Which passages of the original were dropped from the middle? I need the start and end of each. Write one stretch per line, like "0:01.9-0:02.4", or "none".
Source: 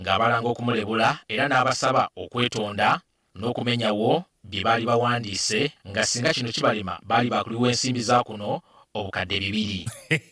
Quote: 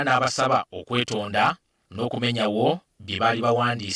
none